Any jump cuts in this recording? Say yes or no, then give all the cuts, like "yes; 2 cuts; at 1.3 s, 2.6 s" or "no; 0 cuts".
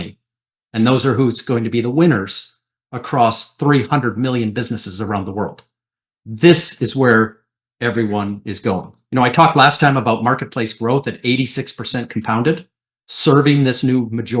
yes; 1 cut; at 8.9 s